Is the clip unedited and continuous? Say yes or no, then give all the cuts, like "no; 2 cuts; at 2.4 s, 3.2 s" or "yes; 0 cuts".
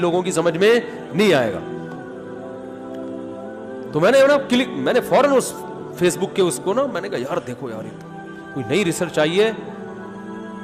no; 2 cuts; at 2.1 s, 3.5 s